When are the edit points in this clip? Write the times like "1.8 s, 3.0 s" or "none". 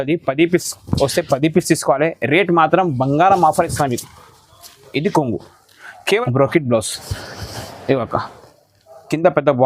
6.2 s